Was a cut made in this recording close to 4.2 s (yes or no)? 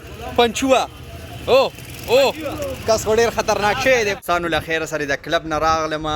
yes